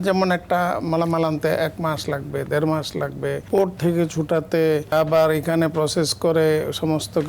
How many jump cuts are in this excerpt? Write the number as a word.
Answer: two